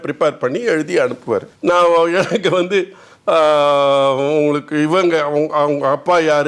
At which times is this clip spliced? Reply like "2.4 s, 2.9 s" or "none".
1.5 s